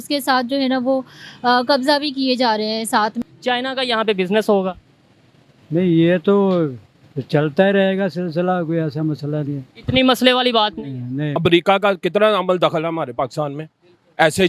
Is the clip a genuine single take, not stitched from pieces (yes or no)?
no